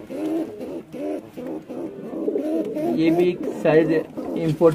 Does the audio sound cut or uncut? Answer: uncut